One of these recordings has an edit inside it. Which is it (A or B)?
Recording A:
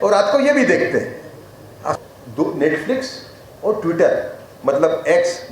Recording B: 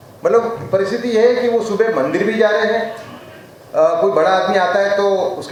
A